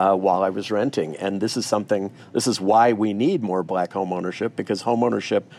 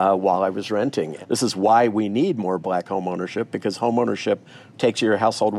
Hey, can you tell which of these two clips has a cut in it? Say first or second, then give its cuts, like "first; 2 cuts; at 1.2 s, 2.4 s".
second; 2 cuts; at 1.2 s, 4.5 s